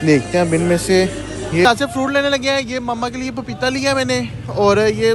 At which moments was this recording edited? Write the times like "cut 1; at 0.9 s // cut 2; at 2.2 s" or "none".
cut 1; at 1.6 s